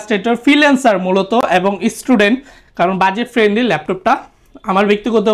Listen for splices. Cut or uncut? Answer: uncut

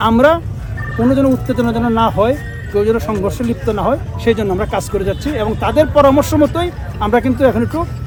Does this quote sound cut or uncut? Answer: uncut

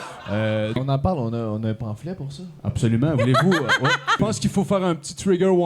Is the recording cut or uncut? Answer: cut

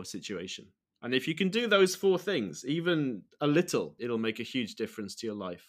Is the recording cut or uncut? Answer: cut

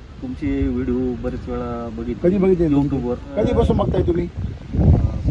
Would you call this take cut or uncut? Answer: cut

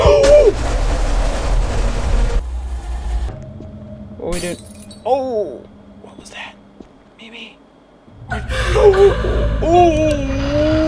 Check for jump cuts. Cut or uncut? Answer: cut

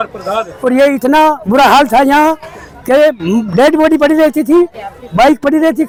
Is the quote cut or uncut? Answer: uncut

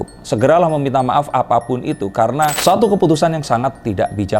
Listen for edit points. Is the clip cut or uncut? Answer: cut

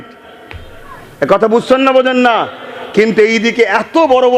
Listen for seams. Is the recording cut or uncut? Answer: uncut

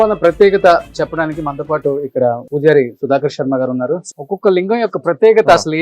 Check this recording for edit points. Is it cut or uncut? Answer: cut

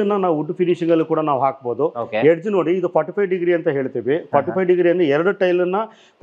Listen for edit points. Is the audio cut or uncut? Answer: uncut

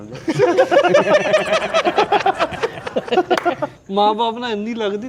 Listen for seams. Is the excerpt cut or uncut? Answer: cut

